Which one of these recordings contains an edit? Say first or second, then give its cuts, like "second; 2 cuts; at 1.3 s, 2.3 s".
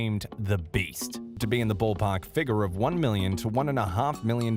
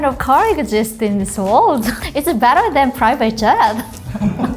second; 1 cut; at 2.0 s